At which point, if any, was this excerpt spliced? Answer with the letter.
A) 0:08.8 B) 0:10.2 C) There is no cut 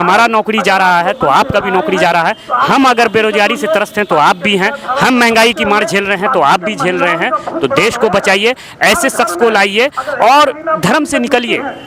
C